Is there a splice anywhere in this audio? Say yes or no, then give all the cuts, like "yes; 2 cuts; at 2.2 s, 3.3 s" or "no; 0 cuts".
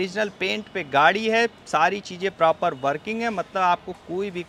no; 0 cuts